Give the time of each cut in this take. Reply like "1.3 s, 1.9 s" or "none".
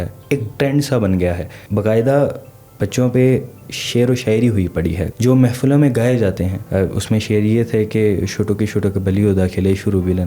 1.5 s, 5.0 s, 6.6 s